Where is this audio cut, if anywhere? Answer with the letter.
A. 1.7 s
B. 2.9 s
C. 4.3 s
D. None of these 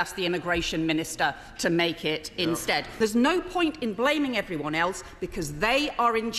B